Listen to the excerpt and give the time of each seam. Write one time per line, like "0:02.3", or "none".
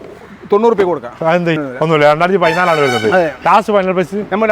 0:01.7